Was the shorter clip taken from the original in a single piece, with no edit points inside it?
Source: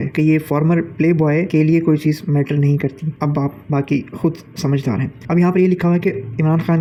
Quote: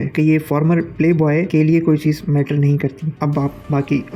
yes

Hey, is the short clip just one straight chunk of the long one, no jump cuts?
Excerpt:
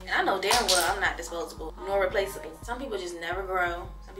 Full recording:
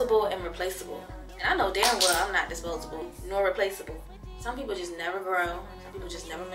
no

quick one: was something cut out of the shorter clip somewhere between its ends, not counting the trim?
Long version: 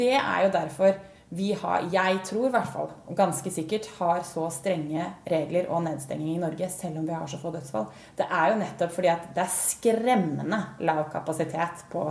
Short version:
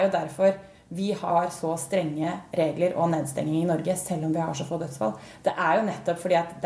yes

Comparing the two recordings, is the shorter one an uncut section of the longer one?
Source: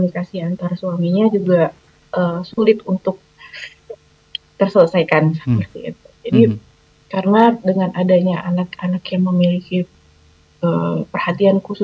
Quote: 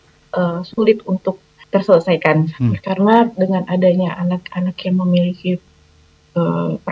no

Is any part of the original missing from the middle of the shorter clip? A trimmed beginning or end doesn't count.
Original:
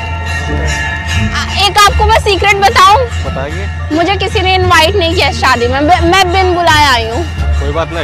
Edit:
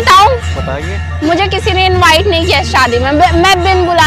no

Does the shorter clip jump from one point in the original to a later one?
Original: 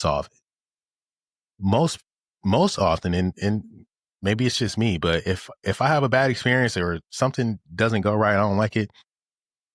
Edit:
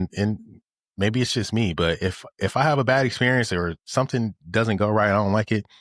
no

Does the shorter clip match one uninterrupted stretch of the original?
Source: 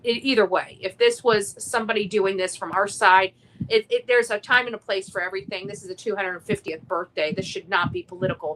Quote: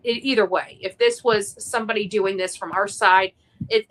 yes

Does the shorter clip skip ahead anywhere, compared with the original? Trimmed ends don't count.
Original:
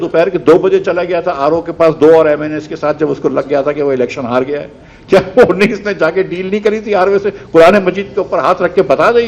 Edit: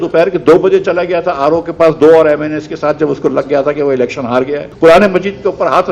yes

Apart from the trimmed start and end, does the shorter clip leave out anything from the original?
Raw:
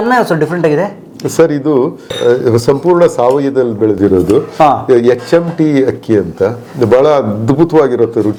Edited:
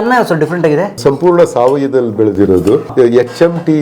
yes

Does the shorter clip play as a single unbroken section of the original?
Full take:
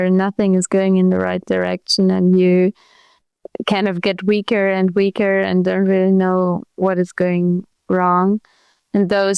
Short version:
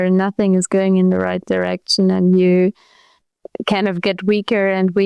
yes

